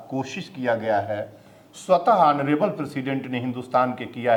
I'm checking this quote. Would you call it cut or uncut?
uncut